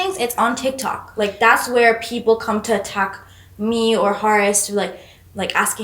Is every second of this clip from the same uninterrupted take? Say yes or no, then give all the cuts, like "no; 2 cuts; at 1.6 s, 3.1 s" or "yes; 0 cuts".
yes; 0 cuts